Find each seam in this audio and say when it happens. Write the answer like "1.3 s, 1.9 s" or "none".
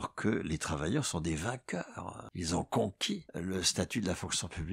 2.2 s, 3.3 s